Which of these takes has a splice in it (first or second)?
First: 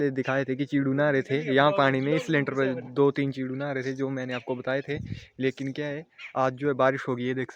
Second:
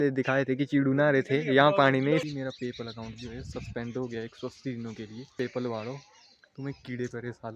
second